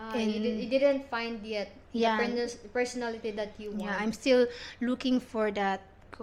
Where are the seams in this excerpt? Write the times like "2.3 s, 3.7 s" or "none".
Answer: none